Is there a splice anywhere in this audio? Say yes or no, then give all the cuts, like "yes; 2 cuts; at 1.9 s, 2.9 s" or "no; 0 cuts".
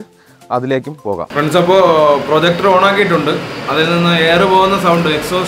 yes; 1 cut; at 1.3 s